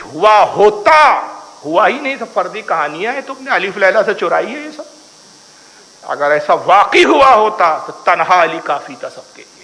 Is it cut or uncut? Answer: uncut